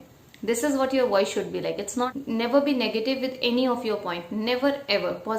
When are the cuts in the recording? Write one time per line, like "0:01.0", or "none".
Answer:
0:02.1